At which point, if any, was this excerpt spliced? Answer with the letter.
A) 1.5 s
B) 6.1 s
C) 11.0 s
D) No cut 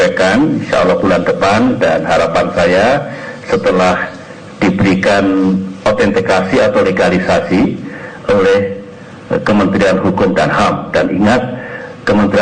C